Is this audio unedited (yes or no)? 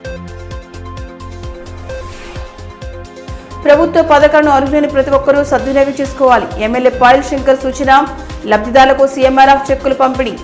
yes